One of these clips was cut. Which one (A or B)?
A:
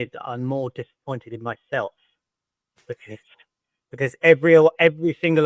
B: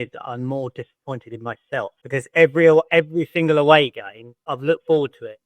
B